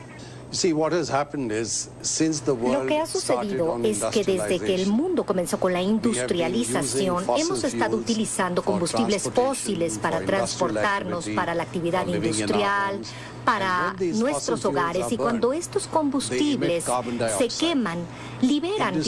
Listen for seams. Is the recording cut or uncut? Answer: cut